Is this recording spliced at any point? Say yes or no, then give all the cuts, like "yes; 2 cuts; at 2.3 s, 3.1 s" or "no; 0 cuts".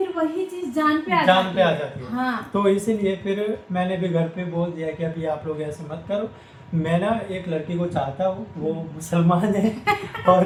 no; 0 cuts